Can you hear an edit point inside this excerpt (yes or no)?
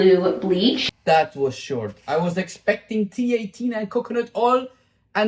no